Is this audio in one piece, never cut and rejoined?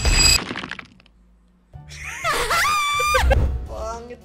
no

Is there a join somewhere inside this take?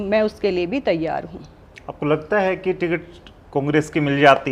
no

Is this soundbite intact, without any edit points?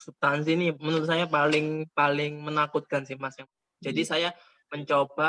no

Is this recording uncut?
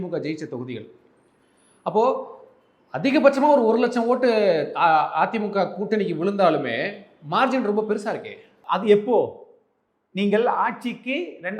no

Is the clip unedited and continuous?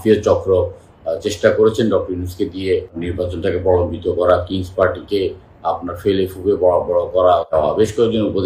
no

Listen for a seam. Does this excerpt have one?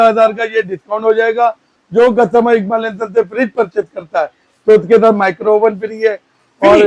no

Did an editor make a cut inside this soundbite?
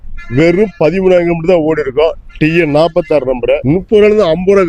yes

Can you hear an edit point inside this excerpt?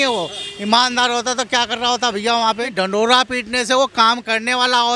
yes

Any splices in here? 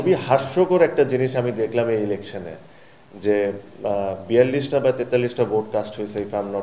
no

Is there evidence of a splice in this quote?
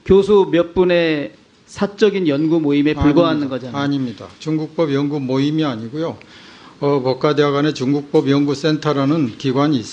no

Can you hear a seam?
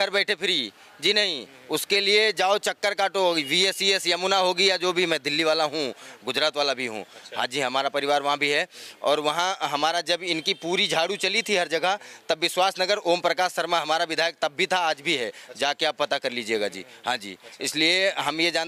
no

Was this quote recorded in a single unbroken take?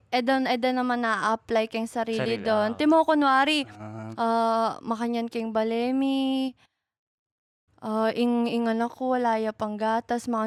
yes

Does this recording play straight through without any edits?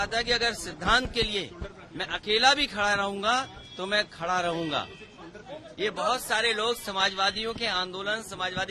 yes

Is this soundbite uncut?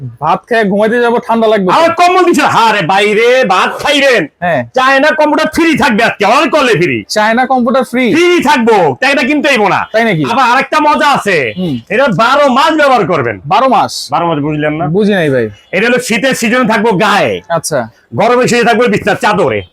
yes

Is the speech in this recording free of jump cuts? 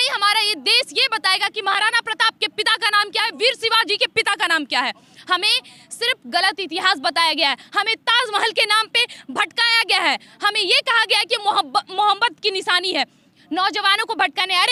yes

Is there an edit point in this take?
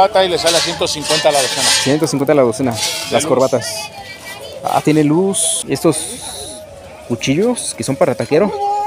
yes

